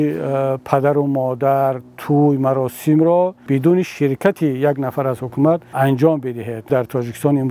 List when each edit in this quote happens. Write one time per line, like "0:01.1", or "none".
0:03.4
0:05.7
0:06.7